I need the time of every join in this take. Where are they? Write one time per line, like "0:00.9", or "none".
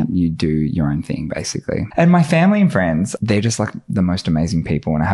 0:01.9
0:03.1

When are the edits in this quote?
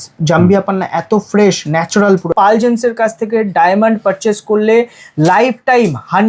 0:02.3

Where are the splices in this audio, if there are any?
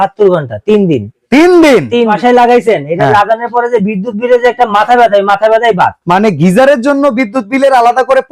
0:02.1

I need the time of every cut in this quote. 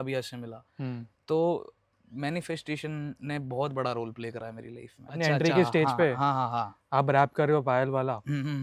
0:05.2

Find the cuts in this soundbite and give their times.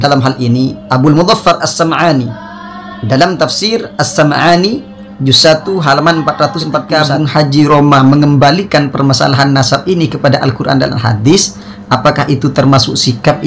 0:06.9

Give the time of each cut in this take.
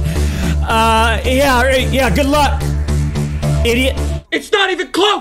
0:04.2

